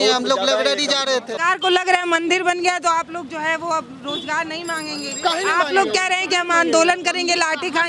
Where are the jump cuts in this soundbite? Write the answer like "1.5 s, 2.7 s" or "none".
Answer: 1.3 s